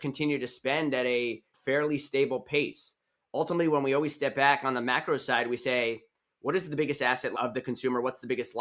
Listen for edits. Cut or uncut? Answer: cut